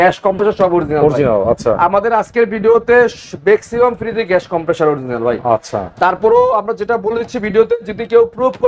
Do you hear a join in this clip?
no; 0 cuts

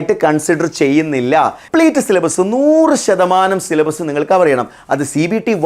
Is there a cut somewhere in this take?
yes; 1 cut; at 1.6 s

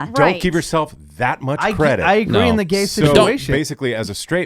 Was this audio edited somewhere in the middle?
yes; 1 cut; at 3.5 s

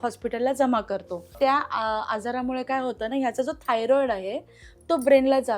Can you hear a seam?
yes; 1 cut; at 1.2 s

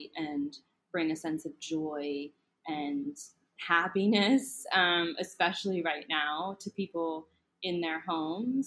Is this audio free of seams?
yes; 0 cuts

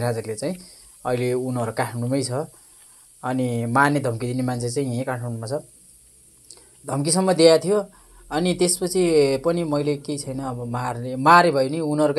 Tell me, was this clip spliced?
no; 0 cuts

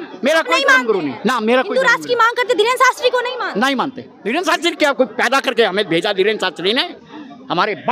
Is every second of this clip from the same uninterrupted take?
no; 1 cut; at 4.1 s

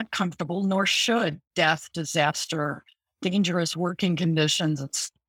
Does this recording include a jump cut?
no; 0 cuts

